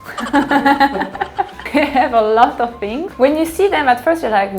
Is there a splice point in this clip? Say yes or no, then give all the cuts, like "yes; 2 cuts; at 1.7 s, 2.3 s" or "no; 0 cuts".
yes; 2 cuts; at 1.6 s, 3.0 s